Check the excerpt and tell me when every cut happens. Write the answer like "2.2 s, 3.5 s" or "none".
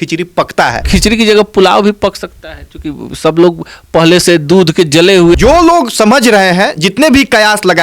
0.8 s, 5.4 s